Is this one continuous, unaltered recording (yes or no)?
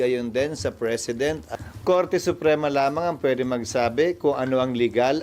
no